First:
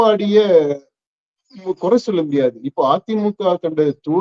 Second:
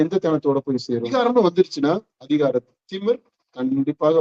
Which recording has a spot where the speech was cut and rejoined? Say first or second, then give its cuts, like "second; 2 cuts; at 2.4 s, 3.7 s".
second; 1 cut; at 1.1 s